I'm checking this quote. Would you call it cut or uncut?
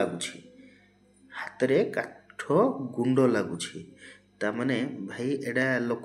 uncut